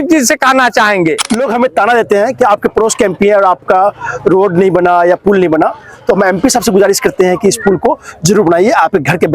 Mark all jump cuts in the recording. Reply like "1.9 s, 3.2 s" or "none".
1.2 s